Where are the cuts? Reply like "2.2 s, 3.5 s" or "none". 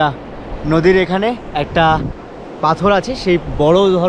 none